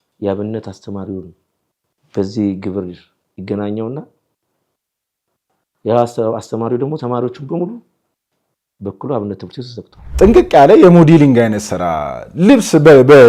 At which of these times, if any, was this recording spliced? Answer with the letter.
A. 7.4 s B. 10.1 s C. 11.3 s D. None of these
B